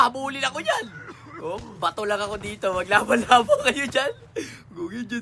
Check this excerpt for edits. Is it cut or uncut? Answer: uncut